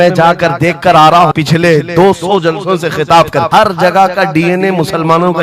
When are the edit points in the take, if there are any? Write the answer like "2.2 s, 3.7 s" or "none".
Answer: 1.3 s, 3.5 s